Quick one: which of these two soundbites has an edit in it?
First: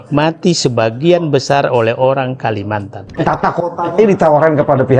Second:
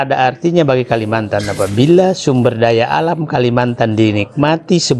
first; 1 cut; at 3.1 s

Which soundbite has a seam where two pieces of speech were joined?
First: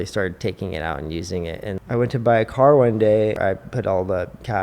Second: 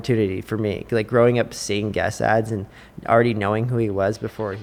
first; 2 cuts; at 1.8 s, 3.4 s

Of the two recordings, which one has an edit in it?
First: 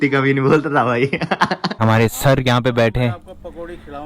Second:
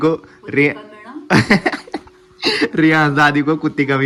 first; 1 cut; at 1.8 s

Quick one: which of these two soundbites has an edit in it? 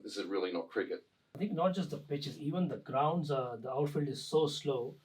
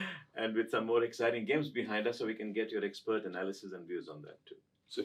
first; 1 cut; at 1.2 s

